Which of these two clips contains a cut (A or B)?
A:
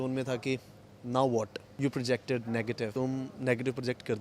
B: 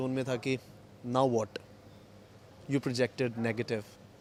A